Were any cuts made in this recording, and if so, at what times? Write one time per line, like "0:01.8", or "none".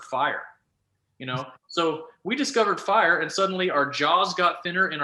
none